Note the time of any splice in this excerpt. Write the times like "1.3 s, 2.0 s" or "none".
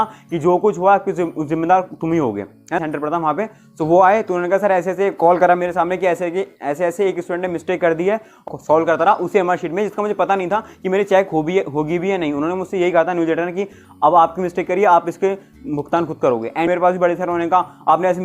2.8 s, 8.4 s, 16.7 s

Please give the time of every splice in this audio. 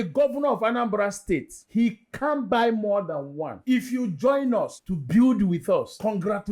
1.6 s, 3.5 s

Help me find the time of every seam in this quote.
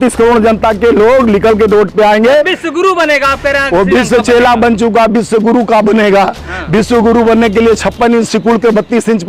none

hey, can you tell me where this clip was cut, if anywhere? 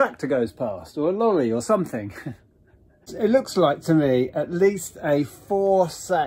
3.1 s

